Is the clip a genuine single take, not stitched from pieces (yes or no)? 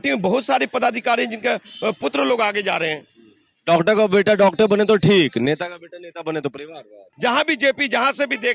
no